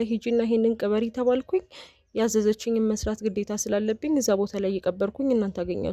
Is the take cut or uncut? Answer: uncut